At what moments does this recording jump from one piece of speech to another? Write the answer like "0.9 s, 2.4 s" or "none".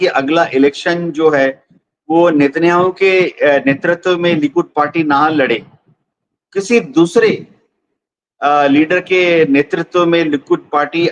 none